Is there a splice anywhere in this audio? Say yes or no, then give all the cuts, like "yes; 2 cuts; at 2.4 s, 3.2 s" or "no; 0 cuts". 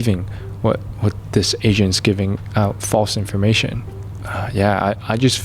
yes; 1 cut; at 3.9 s